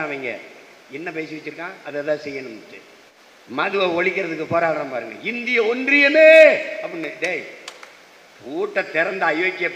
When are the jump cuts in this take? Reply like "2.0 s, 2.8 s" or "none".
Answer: 3.1 s